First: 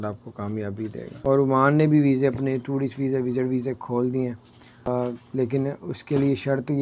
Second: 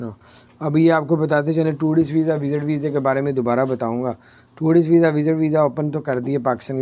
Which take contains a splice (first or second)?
first